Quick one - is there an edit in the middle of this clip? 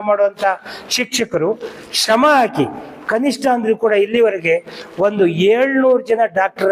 no; 0 cuts

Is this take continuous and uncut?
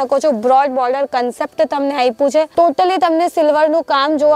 yes; 0 cuts

